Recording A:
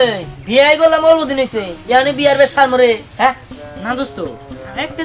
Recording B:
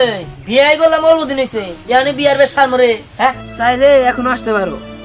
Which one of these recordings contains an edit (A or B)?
B